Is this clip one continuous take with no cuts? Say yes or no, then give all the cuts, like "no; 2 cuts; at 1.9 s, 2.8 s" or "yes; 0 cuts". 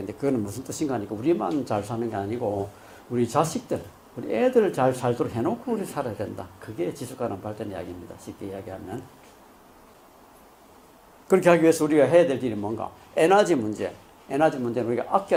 yes; 0 cuts